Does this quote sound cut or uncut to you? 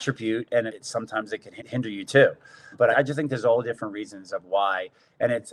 uncut